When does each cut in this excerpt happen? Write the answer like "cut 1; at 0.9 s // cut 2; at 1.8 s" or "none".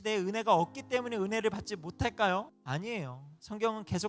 cut 1; at 2.6 s